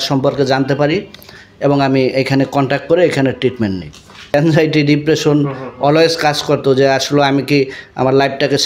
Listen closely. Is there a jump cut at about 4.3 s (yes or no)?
yes